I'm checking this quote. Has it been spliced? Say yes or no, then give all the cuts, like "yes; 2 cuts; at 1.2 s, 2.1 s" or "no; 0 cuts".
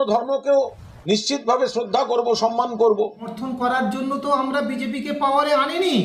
yes; 1 cut; at 3.2 s